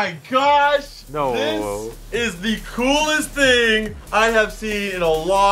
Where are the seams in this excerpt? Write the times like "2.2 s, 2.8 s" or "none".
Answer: 1.0 s, 2.0 s